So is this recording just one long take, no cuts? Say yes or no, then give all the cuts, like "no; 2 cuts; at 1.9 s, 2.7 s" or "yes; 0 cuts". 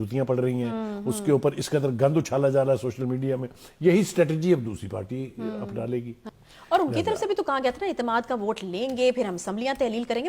no; 1 cut; at 6.2 s